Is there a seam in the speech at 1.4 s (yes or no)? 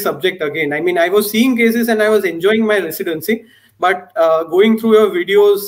no